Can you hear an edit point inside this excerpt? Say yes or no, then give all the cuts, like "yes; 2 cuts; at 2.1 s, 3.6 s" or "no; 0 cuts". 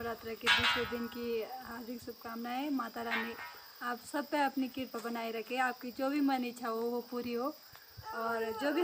no; 0 cuts